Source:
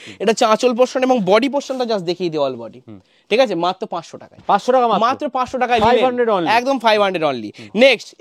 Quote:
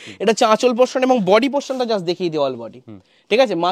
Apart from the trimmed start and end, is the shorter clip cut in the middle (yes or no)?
no